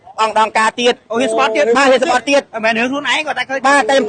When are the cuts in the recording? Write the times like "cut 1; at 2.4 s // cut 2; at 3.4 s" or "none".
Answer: none